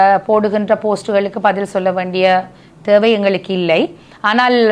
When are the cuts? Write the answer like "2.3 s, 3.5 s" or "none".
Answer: none